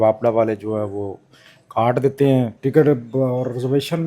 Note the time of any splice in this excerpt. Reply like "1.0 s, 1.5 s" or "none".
2.5 s